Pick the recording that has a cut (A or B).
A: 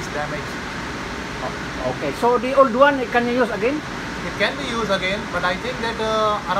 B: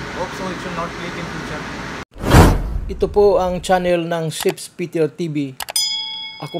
B